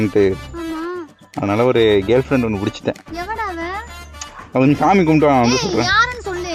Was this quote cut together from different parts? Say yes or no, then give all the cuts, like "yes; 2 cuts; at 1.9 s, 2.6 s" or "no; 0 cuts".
no; 0 cuts